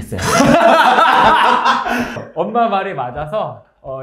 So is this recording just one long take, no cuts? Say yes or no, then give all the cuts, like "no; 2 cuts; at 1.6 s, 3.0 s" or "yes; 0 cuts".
no; 1 cut; at 2.2 s